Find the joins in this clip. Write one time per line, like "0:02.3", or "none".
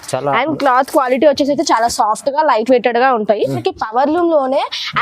0:03.6